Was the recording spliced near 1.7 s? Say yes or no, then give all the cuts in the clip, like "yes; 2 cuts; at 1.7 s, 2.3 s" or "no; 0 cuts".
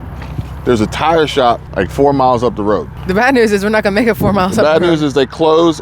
yes; 2 cuts; at 1.7 s, 3.0 s